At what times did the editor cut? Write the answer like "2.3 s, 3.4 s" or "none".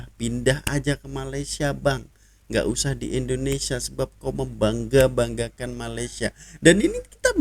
none